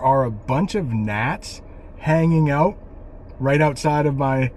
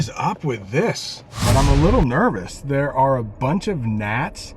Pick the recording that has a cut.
second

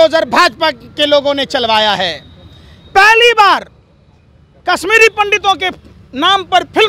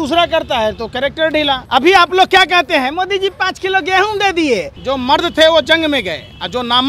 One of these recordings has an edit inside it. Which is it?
second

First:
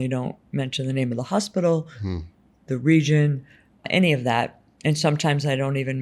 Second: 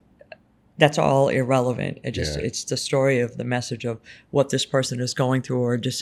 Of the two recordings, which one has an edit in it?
first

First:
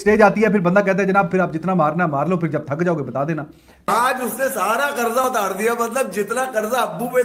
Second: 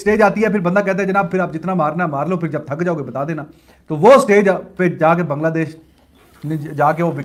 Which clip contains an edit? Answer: first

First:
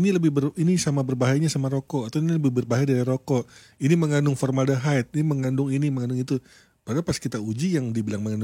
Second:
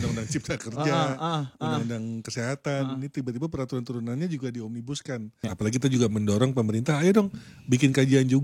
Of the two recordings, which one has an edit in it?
second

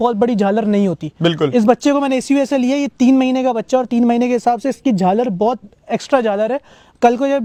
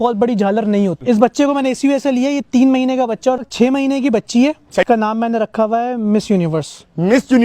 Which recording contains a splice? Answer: second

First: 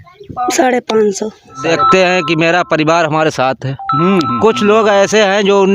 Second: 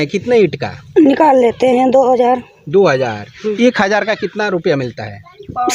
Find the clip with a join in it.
first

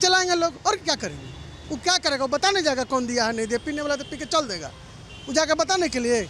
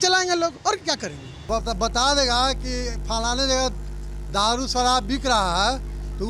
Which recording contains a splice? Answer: second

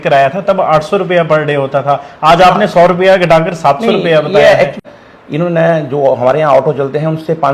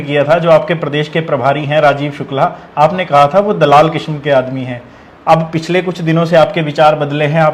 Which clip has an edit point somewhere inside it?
first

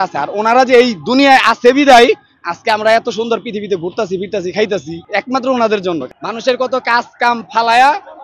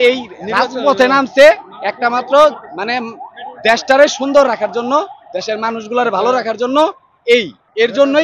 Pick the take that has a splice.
first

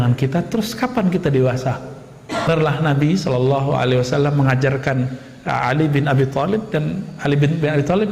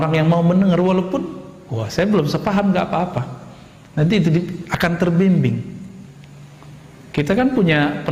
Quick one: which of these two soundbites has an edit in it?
first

